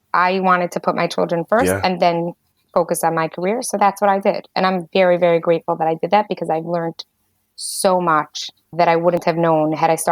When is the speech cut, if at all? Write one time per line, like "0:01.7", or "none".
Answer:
0:08.7